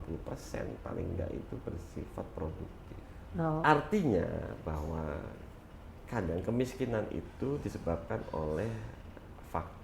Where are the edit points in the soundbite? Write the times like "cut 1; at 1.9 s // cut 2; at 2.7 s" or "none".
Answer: cut 1; at 3.6 s